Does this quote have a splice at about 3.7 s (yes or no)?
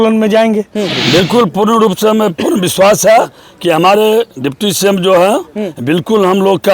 no